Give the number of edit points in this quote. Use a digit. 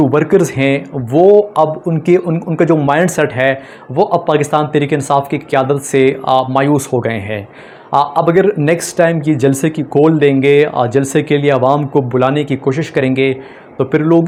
0